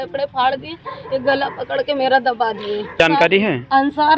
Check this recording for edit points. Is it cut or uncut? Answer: cut